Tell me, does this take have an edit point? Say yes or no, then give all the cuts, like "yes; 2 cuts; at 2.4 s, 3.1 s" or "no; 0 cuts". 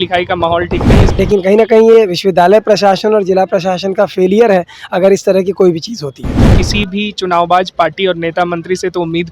yes; 2 cuts; at 1.0 s, 6.5 s